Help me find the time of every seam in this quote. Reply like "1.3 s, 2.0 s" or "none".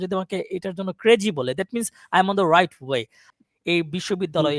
3.2 s